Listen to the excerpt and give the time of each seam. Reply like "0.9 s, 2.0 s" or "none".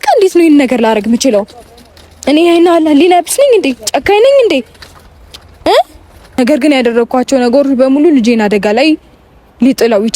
6.3 s